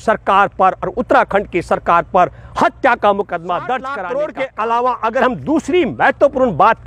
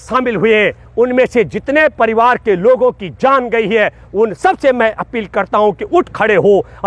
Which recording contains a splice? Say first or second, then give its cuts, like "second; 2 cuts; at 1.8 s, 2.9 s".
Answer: first; 1 cut; at 3.9 s